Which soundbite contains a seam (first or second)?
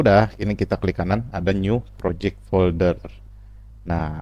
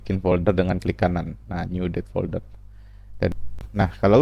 second